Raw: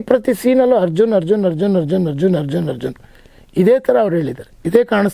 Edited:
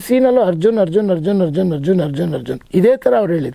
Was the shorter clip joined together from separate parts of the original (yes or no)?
yes